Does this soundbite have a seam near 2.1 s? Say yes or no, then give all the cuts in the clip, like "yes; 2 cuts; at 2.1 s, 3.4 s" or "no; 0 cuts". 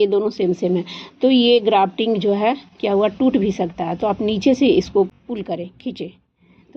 no; 1 cut; at 5.1 s